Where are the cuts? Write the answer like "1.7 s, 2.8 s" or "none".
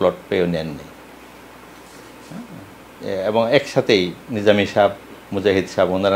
none